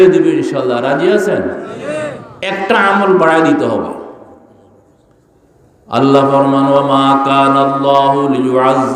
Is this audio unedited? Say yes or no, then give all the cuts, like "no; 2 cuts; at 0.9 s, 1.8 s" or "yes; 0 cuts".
no; 1 cut; at 2.3 s